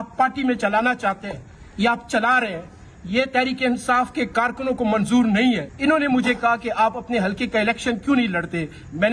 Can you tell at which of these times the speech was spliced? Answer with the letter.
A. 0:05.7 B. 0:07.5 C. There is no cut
A